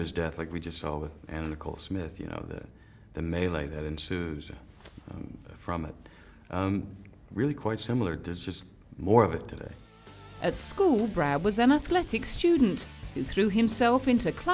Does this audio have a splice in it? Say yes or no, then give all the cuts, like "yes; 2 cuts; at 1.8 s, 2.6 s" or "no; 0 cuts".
no; 0 cuts